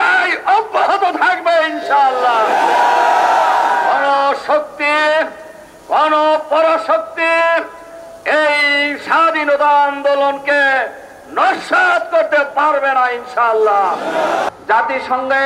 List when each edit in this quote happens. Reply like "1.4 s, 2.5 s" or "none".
14.5 s